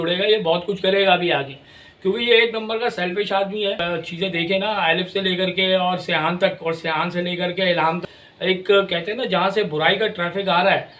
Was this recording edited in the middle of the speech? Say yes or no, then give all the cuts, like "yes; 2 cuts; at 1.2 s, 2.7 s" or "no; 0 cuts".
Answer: yes; 2 cuts; at 3.8 s, 8.1 s